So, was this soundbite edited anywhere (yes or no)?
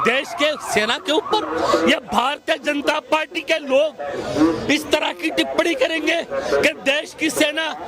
no